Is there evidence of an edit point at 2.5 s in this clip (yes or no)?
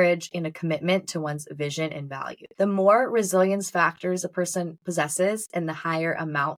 yes